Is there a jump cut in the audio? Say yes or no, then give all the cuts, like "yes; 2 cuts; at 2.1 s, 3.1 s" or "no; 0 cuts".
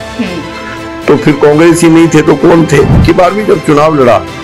yes; 1 cut; at 3.0 s